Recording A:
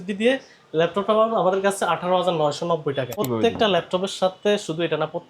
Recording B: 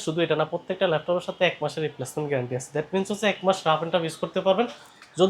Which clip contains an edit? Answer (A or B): A